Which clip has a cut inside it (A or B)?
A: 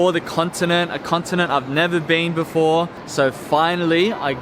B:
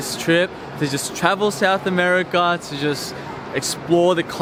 A